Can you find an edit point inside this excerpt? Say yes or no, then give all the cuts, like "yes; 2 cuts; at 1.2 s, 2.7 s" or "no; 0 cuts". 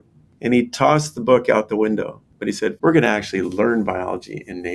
yes; 1 cut; at 2.7 s